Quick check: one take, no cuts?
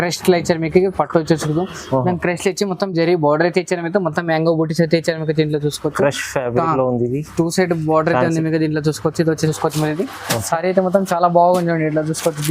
no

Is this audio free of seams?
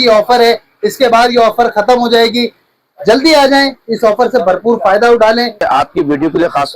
no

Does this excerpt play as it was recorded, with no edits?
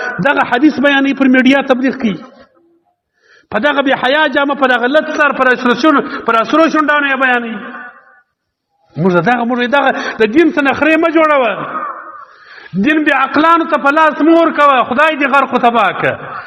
yes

